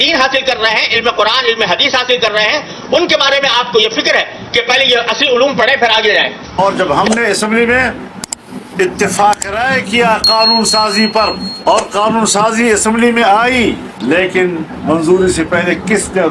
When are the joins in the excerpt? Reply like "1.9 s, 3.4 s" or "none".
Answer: 6.6 s

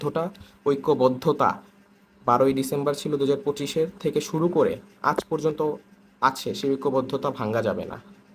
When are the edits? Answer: none

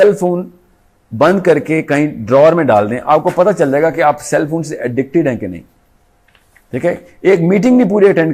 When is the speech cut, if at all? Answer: none

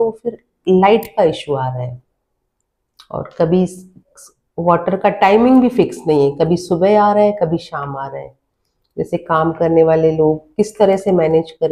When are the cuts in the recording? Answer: none

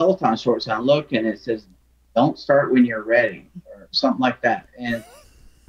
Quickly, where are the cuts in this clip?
none

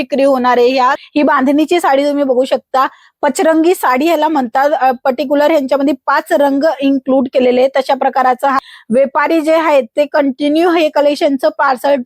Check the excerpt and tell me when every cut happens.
1.0 s, 8.6 s

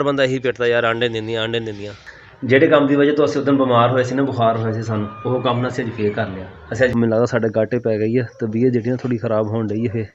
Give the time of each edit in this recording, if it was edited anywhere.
1.9 s, 6.9 s

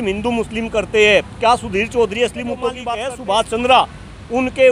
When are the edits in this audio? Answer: 2.8 s

